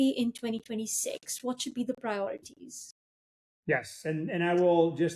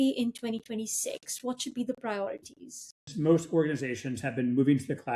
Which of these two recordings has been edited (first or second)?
second